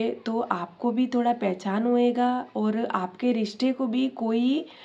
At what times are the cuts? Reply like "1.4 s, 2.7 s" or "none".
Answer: none